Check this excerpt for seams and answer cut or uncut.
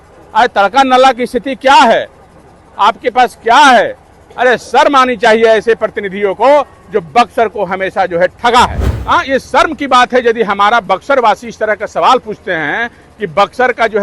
cut